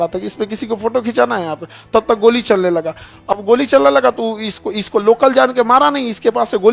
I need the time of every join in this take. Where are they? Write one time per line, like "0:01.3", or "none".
none